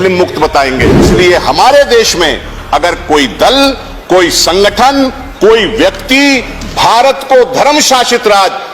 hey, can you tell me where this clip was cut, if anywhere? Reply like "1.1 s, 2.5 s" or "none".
1.1 s